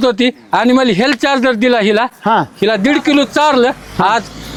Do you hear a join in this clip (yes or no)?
no